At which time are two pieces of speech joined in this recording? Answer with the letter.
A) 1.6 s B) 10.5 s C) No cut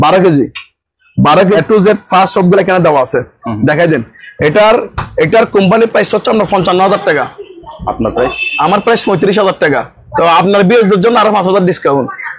A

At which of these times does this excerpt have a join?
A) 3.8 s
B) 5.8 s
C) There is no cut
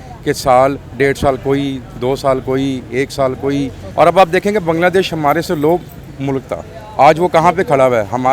A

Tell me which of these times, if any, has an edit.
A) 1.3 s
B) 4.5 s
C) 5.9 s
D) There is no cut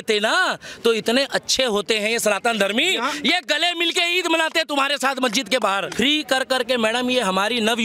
C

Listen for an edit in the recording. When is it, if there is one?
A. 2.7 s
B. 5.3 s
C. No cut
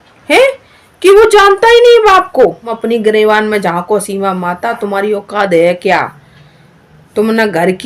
A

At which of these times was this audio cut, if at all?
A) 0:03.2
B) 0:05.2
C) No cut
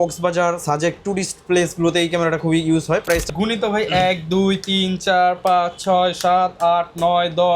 A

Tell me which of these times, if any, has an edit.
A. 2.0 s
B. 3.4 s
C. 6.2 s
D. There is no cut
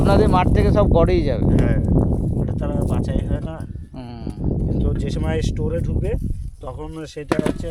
D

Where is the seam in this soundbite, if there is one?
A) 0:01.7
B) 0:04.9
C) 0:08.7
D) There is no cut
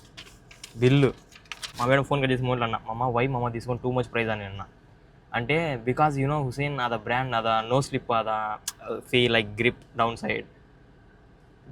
A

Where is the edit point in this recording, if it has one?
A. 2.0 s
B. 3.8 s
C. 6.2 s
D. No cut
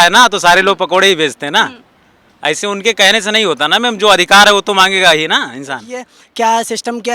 C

